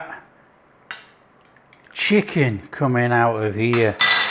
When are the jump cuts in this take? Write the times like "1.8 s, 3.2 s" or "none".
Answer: none